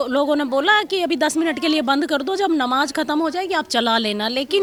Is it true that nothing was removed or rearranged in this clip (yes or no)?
yes